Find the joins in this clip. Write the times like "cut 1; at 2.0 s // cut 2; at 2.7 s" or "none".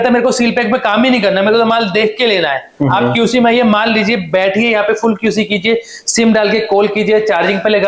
none